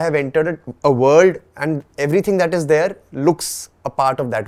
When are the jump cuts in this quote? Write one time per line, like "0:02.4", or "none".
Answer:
none